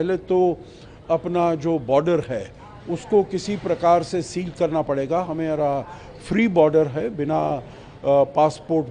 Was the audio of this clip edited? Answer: no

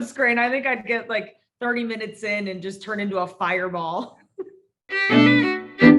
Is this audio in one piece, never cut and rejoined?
no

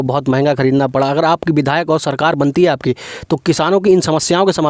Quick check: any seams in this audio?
no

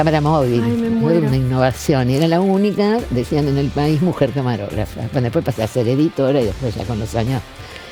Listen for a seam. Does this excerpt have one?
no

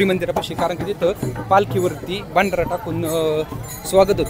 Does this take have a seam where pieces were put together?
no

